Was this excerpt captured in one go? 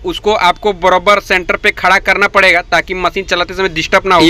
yes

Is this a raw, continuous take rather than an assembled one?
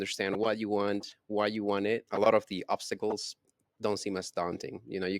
no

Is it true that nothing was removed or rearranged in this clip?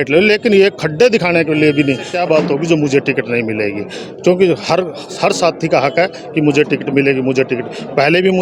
no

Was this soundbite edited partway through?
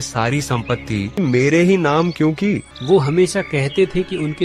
yes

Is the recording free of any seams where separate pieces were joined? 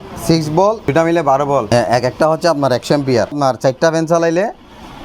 no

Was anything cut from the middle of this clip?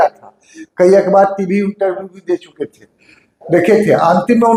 no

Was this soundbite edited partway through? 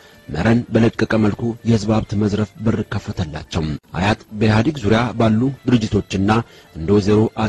yes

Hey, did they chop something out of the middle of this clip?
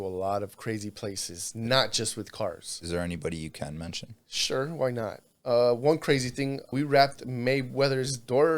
yes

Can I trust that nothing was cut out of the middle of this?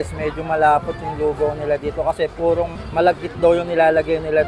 no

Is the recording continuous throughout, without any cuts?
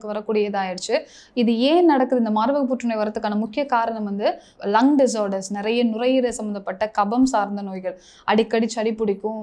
no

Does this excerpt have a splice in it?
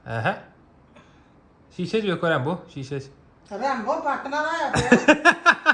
no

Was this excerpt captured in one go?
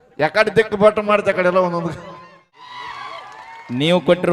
no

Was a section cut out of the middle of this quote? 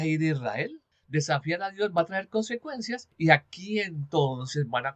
yes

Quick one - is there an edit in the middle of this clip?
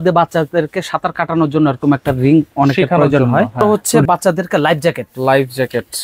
yes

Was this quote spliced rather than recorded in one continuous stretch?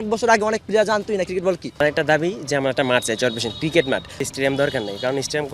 yes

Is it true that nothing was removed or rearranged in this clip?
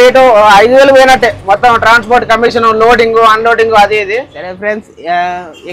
no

